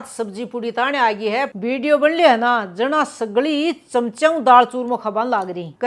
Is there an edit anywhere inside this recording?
yes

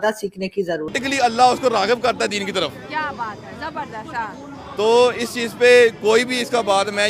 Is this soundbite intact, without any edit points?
no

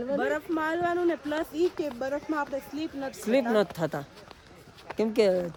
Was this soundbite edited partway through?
no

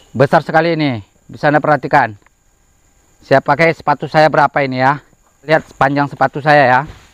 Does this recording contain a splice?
yes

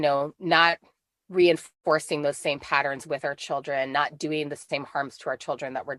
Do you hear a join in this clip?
no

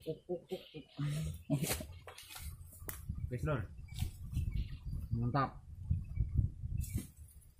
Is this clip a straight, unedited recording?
yes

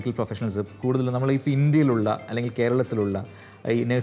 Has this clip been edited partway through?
no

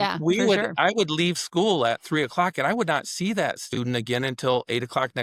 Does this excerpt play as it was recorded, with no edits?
yes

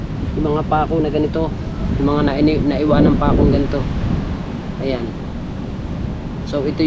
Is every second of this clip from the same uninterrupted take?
yes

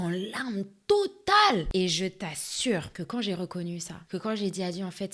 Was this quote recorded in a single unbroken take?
no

